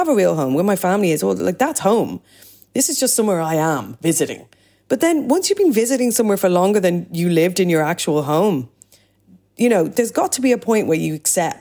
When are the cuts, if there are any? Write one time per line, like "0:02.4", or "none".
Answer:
0:09.9